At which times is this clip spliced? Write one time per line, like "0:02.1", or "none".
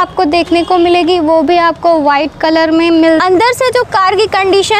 0:03.2